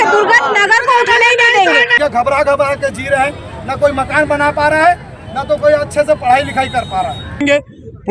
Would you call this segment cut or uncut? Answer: cut